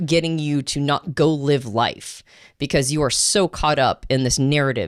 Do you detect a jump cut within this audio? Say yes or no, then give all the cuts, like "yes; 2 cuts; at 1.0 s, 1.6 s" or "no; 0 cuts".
no; 0 cuts